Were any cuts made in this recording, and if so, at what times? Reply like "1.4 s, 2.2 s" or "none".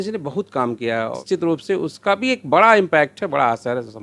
1.2 s